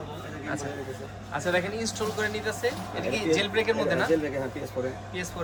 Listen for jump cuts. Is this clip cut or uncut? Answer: uncut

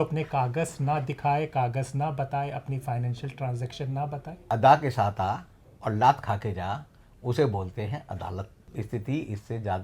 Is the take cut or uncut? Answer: cut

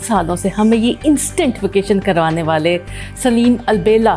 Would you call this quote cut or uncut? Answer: uncut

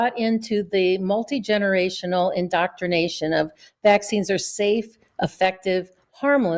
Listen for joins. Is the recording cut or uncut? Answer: uncut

